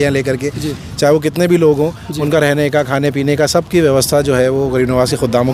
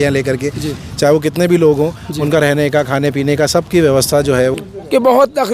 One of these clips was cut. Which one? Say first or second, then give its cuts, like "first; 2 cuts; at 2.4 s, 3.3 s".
second; 1 cut; at 4.5 s